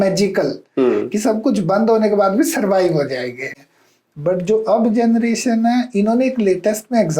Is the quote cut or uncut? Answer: cut